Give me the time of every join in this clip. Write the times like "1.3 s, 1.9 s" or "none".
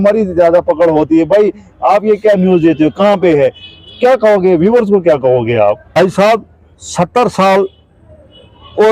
6.0 s